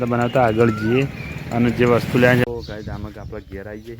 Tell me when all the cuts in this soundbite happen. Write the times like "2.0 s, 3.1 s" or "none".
2.4 s